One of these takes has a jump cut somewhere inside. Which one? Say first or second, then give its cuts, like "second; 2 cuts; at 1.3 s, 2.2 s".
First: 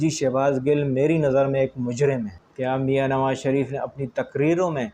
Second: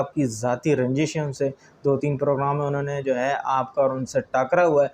first; 1 cut; at 2.4 s